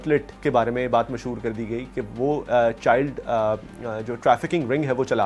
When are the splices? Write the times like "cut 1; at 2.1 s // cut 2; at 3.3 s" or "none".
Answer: none